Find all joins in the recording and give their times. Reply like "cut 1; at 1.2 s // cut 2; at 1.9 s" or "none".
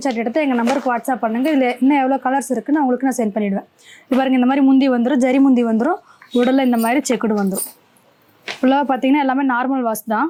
none